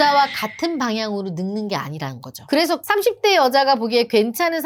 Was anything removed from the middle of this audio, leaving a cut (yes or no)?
yes